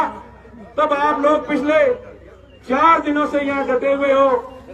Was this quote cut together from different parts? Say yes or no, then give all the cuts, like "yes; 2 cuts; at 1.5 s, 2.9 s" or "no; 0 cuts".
no; 0 cuts